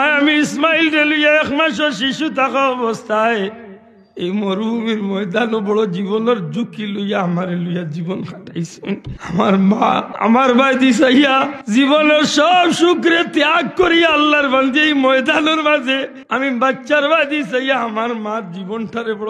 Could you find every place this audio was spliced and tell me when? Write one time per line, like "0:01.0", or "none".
0:09.1
0:10.1
0:11.6
0:16.2